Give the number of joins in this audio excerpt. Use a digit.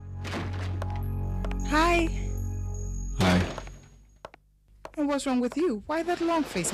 1